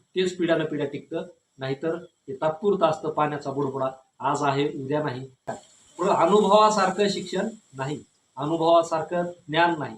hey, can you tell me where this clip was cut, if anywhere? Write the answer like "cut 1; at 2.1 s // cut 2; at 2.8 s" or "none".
cut 1; at 5.3 s